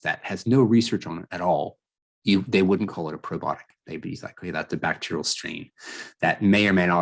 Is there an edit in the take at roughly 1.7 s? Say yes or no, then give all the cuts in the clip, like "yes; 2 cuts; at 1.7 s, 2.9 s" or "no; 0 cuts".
no; 0 cuts